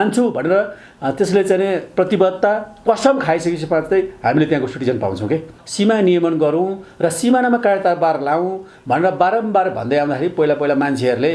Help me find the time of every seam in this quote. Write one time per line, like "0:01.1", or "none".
0:05.6